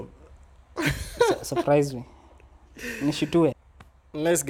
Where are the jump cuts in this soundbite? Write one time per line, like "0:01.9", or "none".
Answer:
0:03.6